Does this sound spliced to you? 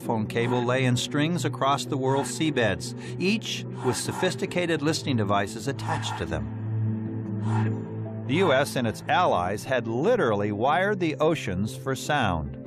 yes; 1 cut; at 7.8 s

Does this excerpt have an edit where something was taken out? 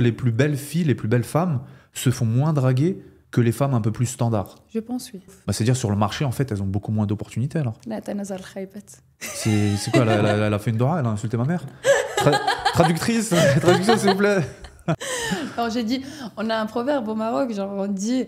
yes; 2 cuts; at 5.3 s, 15.0 s

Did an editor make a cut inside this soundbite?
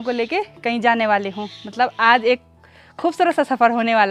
no; 0 cuts

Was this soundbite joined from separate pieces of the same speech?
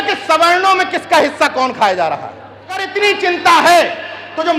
yes; 1 cut; at 2.9 s

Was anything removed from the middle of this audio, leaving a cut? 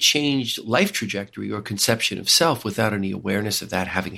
no; 0 cuts

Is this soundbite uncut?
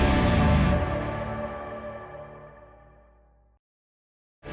no; 1 cut; at 2.1 s

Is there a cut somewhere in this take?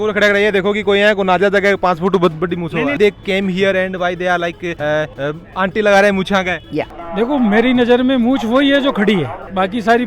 yes; 2 cuts; at 3.0 s, 6.9 s

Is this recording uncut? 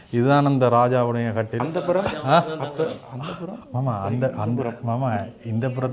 no; 1 cut; at 1.5 s

